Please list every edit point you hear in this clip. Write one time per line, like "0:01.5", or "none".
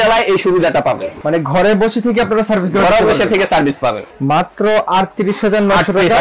0:01.1
0:04.1